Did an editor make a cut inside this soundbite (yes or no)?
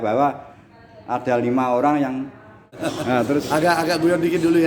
yes